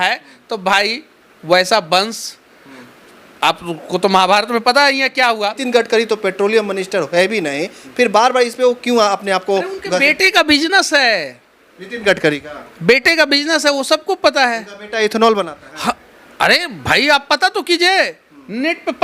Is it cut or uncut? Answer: cut